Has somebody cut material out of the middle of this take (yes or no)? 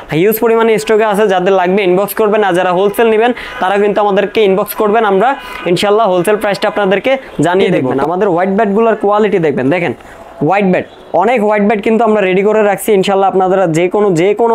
yes